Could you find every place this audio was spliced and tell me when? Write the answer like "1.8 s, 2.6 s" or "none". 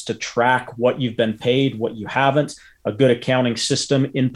none

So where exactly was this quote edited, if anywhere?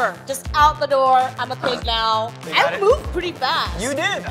2.4 s

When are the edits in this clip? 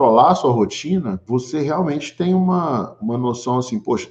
1.2 s

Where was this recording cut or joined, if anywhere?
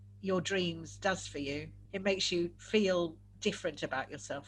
1.8 s, 2.6 s

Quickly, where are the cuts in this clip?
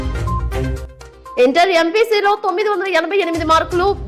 1.1 s

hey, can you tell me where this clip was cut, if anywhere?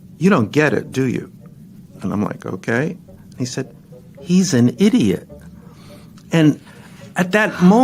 none

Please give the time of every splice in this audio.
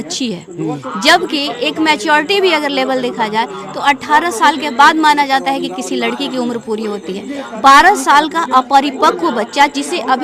none

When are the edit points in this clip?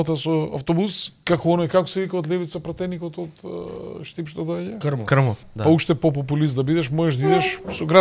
1.1 s, 5.4 s

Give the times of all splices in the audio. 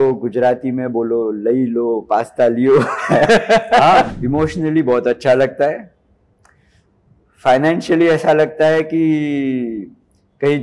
4.1 s

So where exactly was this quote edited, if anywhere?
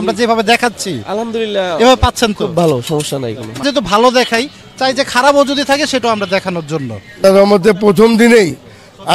3.6 s, 7.2 s

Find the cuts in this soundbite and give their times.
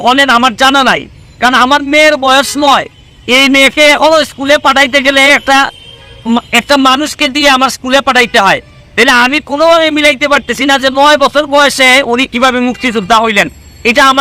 none

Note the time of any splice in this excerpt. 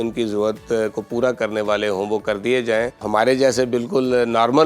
3.0 s

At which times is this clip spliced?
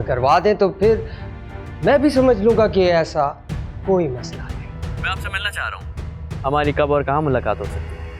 4.8 s

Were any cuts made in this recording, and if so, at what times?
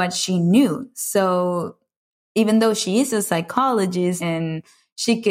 4.2 s

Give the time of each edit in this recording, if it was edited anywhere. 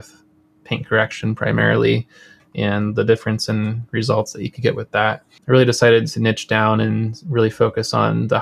5.3 s

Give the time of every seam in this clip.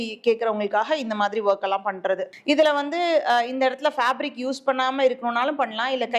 2.3 s

